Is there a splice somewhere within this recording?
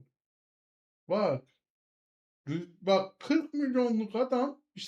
no; 0 cuts

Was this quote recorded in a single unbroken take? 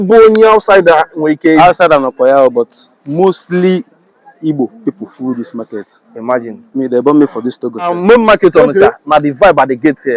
no; 1 cut; at 7.9 s

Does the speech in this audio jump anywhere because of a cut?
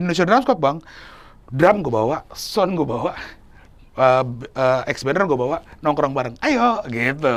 no; 0 cuts

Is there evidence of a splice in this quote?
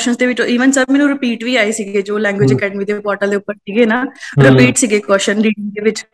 no; 0 cuts

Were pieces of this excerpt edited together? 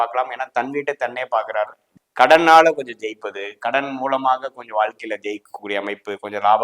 yes; 1 cut; at 1.9 s

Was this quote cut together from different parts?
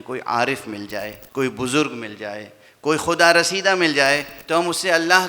yes; 2 cuts; at 1.2 s, 4.3 s

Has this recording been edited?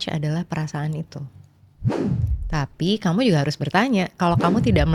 no; 0 cuts

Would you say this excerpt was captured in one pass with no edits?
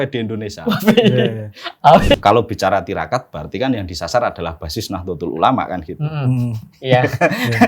no; 1 cut; at 2.1 s

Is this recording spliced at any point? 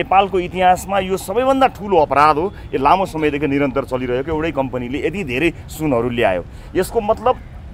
no; 0 cuts

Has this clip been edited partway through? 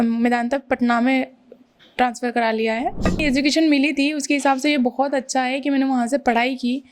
yes; 1 cut; at 3.2 s

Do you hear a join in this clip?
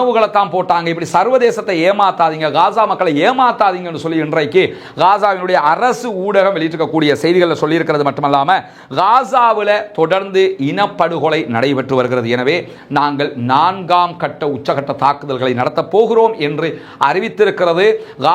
no; 0 cuts

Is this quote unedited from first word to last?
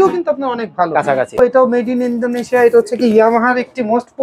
no; 1 cut; at 1.4 s

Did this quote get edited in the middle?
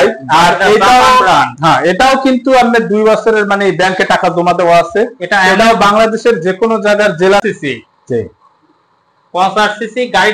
yes; 1 cut; at 7.4 s

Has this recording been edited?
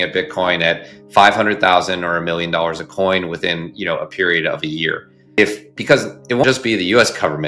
no; 0 cuts

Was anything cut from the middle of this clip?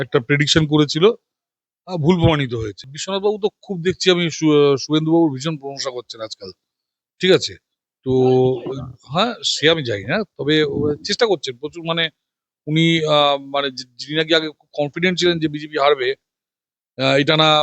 yes; 1 cut; at 3.0 s

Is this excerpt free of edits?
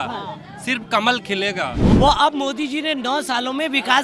no; 1 cut; at 1.8 s

